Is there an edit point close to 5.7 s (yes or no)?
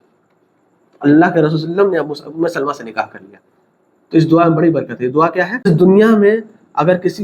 yes